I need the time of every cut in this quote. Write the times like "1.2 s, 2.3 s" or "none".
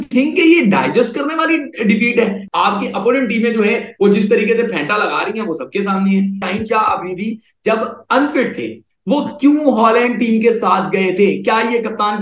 2.4 s, 6.4 s